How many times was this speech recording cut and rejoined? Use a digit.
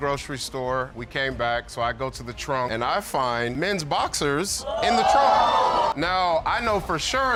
0